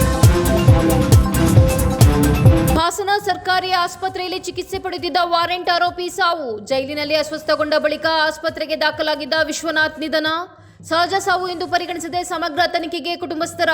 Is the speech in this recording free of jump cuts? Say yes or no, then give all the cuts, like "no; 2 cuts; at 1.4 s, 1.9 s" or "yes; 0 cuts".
no; 1 cut; at 2.7 s